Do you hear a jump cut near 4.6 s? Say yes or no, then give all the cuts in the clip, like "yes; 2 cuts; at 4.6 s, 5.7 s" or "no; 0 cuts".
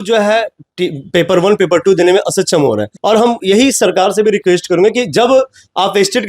no; 1 cut; at 2.9 s